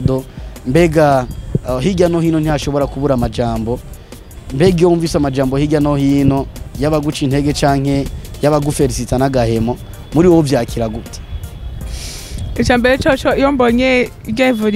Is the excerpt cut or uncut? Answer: uncut